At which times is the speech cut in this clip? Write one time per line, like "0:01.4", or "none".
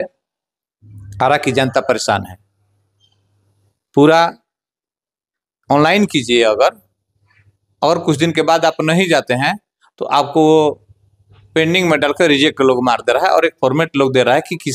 none